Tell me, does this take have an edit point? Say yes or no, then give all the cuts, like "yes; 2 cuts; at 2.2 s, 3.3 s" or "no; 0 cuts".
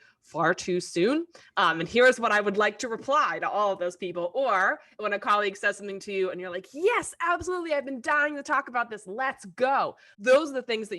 yes; 1 cut; at 10.1 s